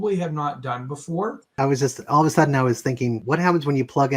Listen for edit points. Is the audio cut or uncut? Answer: cut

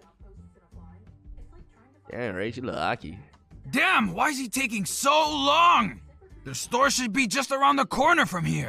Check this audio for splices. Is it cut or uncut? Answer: uncut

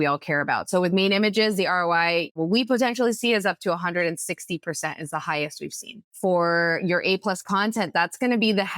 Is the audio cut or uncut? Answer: cut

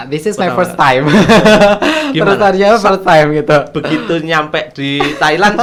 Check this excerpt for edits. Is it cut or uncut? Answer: uncut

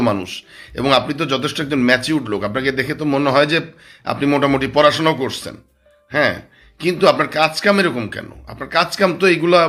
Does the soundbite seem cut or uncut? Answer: uncut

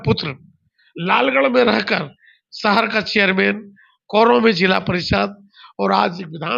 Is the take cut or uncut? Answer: uncut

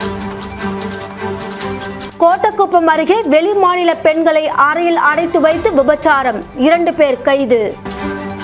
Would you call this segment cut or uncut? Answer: cut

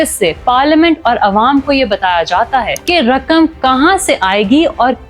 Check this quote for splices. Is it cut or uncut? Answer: cut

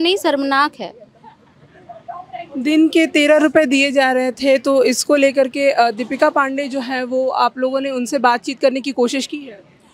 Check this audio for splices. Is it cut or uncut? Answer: uncut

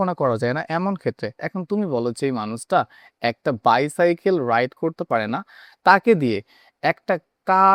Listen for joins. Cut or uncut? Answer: uncut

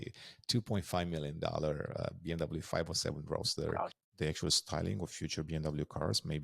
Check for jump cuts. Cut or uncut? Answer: cut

